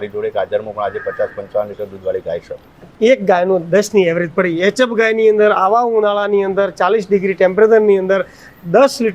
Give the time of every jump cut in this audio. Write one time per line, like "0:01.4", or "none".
0:02.8

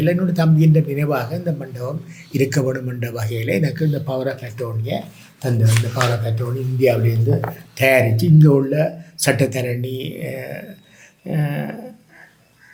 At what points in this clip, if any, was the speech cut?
none

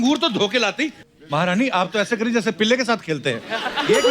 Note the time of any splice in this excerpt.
0:01.0

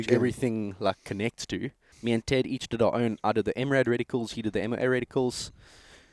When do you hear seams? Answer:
0:01.9

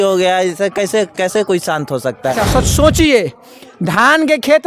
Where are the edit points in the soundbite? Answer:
0:02.1

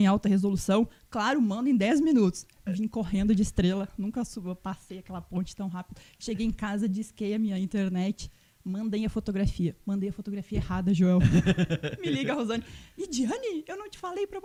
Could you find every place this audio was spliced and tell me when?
none

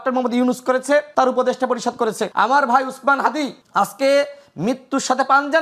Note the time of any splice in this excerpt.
0:01.1
0:02.2
0:03.6

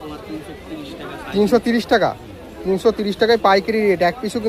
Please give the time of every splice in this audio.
none

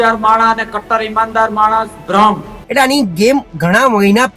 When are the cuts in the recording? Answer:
0:02.6

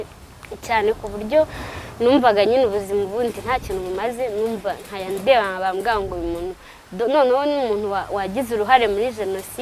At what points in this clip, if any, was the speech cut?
none

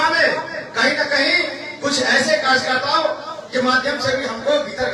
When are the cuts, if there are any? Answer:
none

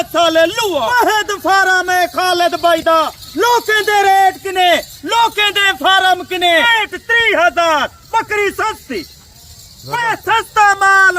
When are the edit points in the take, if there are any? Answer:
0:00.9
0:06.7

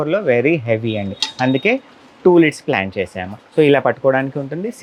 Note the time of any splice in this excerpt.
none

